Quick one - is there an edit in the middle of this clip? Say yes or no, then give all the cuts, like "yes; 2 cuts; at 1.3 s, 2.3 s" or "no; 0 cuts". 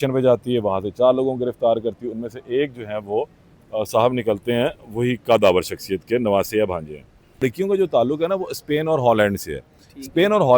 yes; 1 cut; at 7.4 s